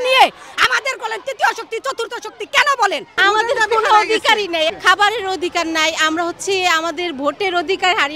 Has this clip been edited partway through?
yes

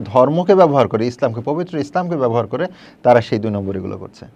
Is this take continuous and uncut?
yes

